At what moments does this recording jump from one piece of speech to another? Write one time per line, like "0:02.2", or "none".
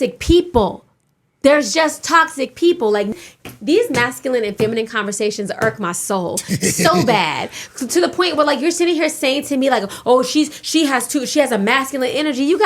0:03.1